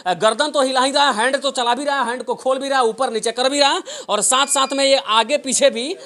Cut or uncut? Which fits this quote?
uncut